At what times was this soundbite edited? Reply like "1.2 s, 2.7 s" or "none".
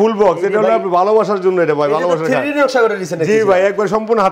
none